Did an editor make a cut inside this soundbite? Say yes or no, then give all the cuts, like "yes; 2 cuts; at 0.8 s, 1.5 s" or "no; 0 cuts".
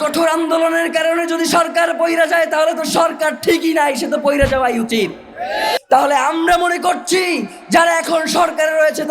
yes; 1 cut; at 5.8 s